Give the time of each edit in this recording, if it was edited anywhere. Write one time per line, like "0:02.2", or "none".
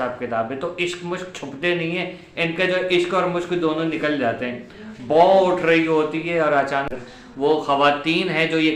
0:07.0